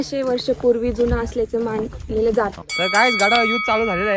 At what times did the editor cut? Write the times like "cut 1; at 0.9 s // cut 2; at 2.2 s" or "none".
cut 1; at 2.5 s